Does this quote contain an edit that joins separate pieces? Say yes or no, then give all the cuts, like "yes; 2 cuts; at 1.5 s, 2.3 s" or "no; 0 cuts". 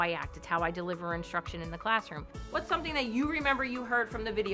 yes; 1 cut; at 2.4 s